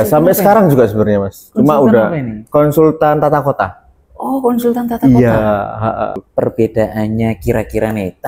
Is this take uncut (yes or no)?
no